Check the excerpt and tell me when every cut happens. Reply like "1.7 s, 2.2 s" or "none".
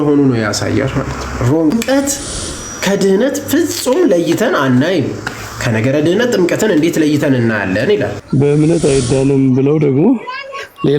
1.7 s, 8.2 s